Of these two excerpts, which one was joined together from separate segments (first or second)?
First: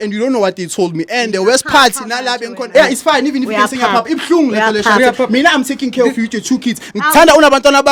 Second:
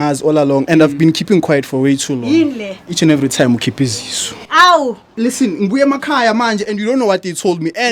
second